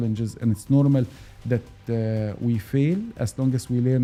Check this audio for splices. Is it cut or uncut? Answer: uncut